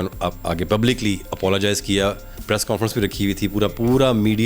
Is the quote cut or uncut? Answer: cut